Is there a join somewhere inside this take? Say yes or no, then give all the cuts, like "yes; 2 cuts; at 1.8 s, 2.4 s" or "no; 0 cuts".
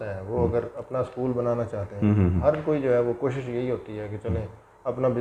no; 0 cuts